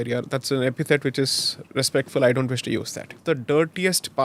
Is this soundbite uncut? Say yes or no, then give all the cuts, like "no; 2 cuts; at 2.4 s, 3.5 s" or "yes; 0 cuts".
no; 1 cut; at 3.1 s